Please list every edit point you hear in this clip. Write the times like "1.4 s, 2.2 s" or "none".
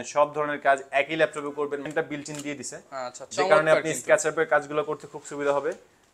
1.9 s